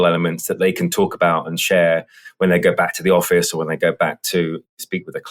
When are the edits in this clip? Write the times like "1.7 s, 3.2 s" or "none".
none